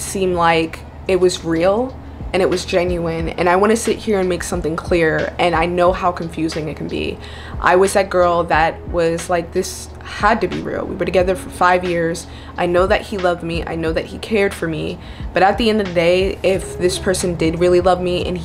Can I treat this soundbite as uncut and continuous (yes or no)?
yes